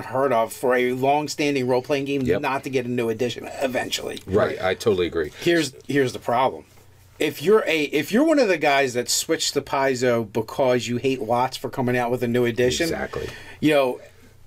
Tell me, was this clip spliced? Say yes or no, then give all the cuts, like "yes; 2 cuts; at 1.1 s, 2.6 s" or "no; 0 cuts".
yes; 1 cut; at 10.1 s